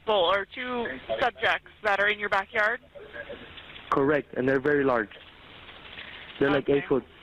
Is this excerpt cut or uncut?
uncut